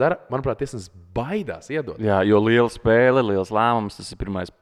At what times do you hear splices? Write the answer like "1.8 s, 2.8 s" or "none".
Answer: none